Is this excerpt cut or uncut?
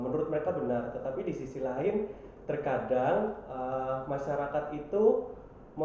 uncut